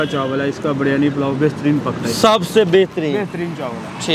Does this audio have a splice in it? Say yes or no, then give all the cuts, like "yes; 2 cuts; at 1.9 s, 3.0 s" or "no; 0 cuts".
no; 0 cuts